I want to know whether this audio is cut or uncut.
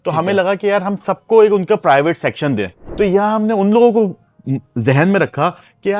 cut